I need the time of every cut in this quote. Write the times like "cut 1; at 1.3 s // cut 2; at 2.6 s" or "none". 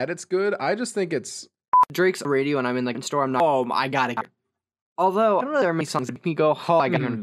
cut 1; at 1.9 s